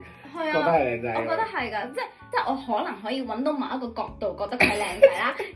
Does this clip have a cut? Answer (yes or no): yes